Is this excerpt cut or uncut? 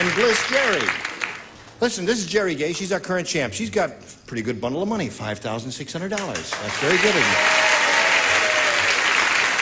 uncut